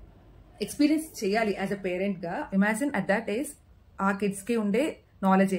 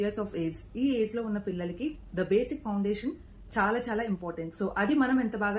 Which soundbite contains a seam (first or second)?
first